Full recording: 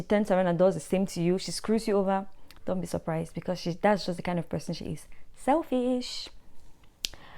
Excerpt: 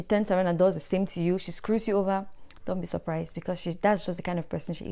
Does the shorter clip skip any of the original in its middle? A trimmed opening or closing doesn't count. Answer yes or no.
no